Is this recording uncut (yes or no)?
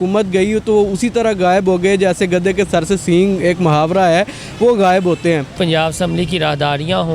no